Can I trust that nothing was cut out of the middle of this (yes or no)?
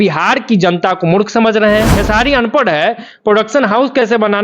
no